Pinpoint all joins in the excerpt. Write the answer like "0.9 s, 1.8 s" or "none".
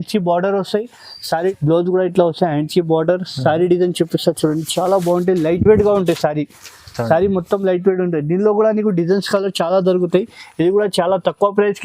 1.5 s